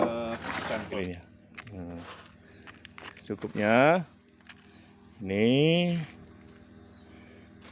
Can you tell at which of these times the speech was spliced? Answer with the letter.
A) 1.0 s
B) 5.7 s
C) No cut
A